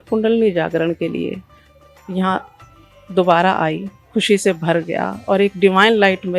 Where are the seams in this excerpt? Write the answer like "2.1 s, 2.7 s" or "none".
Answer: 3.9 s